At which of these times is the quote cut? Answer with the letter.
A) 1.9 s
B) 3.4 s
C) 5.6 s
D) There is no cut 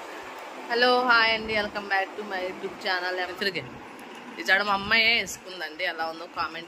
B